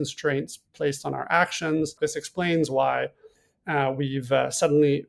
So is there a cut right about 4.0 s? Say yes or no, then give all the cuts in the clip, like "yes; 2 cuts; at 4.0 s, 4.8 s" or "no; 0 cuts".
no; 1 cut; at 2.0 s